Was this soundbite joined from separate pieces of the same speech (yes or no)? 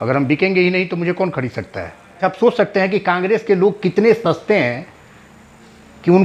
yes